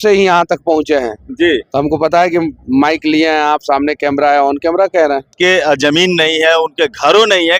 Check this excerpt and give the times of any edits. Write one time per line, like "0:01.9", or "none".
none